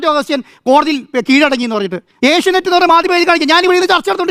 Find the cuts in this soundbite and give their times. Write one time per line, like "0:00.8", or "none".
none